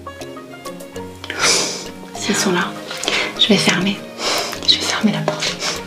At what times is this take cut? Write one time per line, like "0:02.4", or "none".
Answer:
0:02.2